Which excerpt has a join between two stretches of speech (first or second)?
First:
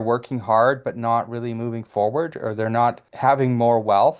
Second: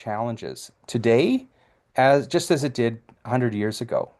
first